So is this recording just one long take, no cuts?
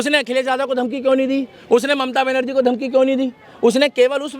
yes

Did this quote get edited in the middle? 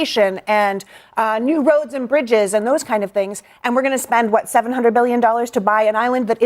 no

